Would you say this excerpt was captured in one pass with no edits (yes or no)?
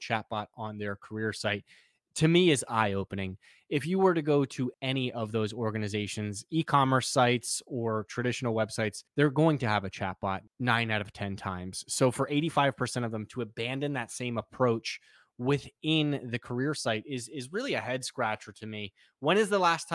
no